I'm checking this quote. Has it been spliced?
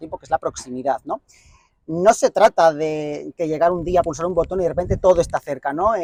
no; 0 cuts

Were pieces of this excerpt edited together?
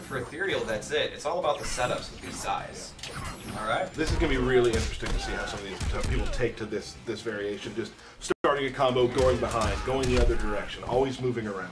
no; 0 cuts

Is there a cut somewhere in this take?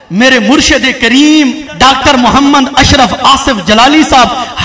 yes; 1 cut; at 1.7 s

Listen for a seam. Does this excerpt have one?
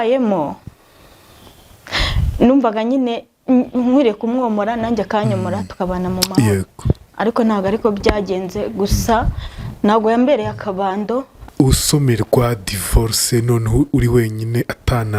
yes; 1 cut; at 11.4 s

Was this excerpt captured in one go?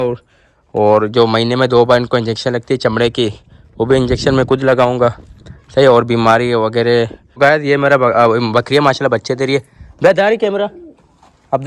no; 1 cut; at 7.2 s

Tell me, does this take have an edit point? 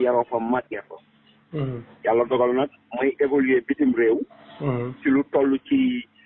no; 0 cuts

